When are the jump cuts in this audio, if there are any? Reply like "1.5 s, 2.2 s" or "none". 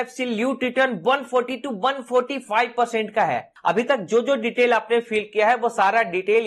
3.5 s